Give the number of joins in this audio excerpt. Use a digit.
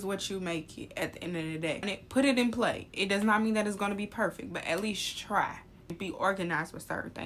2